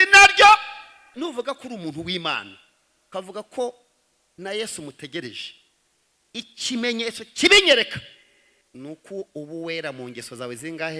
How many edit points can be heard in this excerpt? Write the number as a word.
one